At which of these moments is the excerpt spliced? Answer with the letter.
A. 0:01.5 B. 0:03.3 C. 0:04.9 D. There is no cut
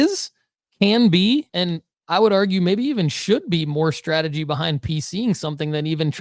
A